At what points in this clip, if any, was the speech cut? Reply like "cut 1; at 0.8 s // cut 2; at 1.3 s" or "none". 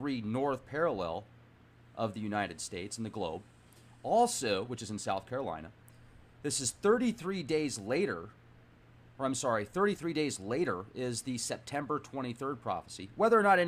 none

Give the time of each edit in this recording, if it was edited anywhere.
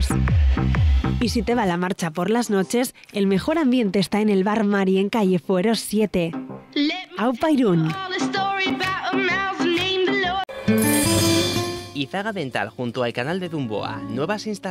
cut 1; at 10.5 s

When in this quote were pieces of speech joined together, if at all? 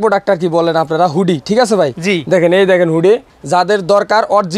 cut 1; at 3.3 s

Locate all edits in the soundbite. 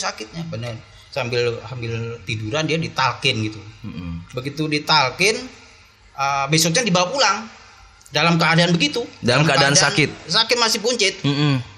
none

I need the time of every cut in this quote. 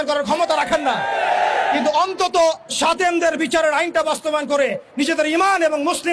none

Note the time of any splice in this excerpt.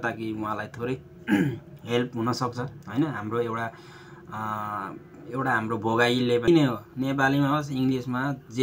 cut 1; at 6.5 s

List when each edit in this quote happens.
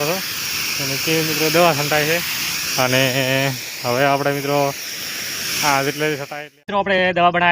cut 1; at 6.3 s

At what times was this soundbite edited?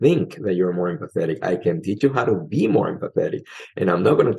cut 1; at 2.0 s

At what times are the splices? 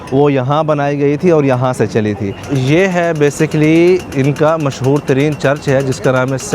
cut 1; at 2.4 s // cut 2; at 4.1 s

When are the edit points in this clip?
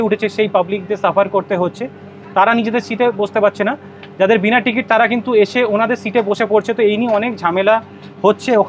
none

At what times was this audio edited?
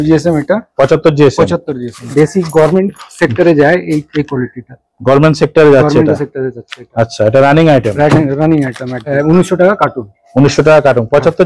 cut 1; at 2.1 s // cut 2; at 9.1 s

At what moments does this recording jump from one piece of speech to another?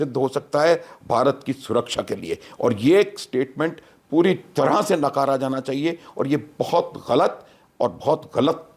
none

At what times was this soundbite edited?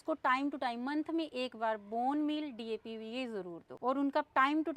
cut 1; at 3.7 s

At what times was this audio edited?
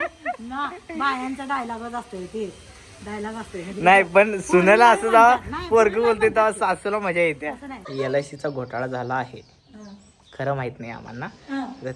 cut 1; at 7.9 s

